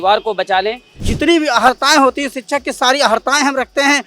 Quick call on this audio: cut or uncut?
cut